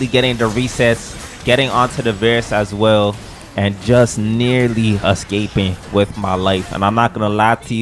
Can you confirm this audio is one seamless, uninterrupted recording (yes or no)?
yes